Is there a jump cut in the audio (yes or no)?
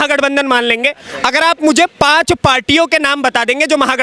no